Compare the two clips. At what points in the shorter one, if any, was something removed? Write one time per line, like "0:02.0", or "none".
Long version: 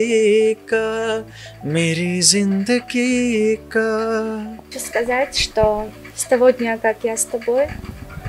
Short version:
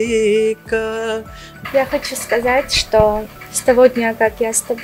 0:01.7